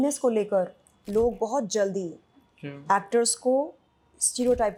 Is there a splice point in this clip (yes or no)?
no